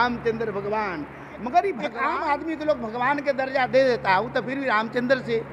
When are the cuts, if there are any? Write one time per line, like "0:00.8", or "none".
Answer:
0:01.9